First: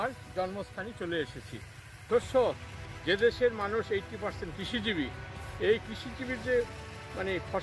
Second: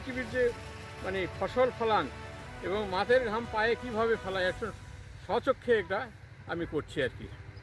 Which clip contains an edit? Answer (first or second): first